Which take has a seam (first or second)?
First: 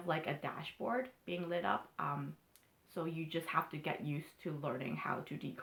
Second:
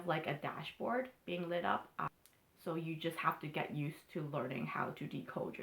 second